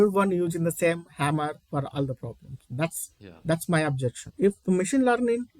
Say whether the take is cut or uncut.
cut